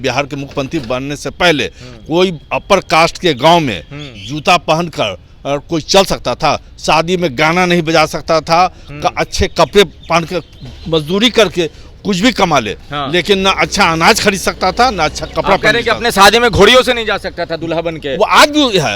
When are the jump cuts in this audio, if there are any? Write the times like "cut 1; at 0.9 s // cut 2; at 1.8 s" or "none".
none